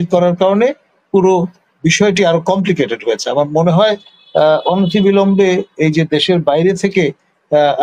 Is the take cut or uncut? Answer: uncut